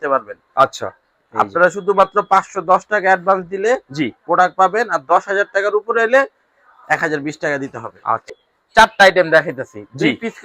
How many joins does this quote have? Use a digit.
1